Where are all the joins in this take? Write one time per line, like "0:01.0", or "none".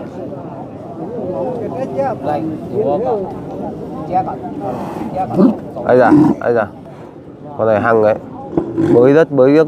none